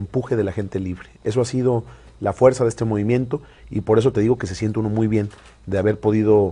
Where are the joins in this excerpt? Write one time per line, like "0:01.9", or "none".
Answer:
none